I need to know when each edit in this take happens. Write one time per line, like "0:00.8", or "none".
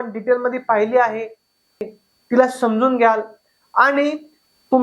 0:01.8